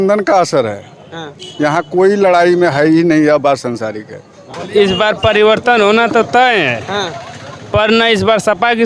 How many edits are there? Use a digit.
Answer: 1